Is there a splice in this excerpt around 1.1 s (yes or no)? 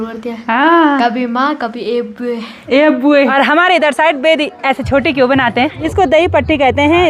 no